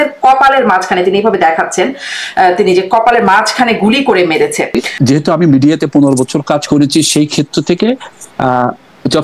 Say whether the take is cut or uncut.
cut